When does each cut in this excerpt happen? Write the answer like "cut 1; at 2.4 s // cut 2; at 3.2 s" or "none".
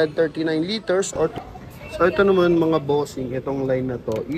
cut 1; at 1.3 s